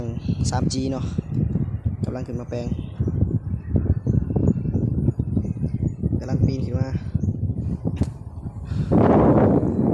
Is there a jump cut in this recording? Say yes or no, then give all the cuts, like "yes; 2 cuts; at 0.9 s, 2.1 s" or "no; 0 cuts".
yes; 1 cut; at 7.7 s